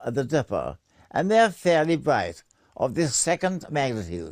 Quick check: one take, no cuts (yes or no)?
no